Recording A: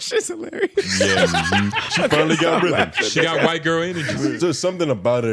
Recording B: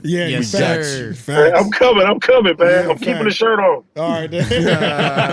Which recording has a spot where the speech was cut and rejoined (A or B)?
A